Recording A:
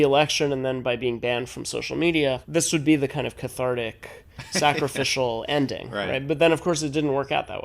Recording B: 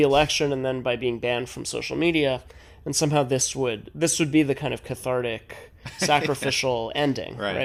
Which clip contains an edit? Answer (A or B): A